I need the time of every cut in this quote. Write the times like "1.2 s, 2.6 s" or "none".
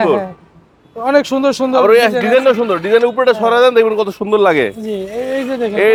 none

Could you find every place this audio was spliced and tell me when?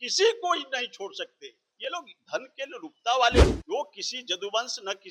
3.5 s

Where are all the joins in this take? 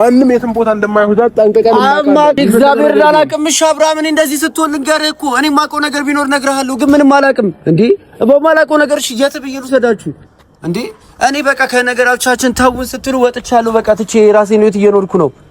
2.4 s

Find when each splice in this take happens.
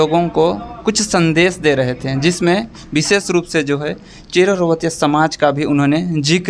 none

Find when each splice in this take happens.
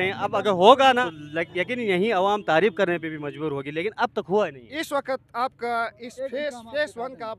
1.0 s

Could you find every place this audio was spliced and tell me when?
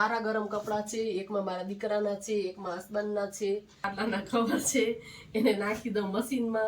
3.9 s

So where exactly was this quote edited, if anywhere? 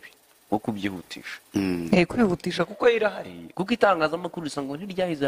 none

